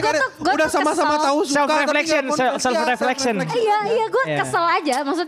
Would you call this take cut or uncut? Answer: uncut